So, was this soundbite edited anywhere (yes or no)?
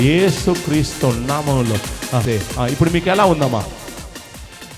yes